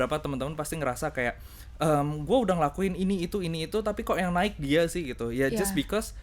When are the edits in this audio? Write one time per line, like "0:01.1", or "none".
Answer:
none

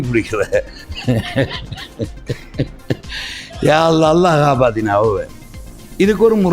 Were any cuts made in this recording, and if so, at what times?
none

